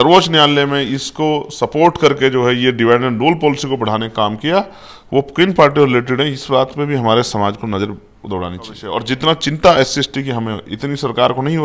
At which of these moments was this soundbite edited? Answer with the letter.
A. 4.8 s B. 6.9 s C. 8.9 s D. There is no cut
C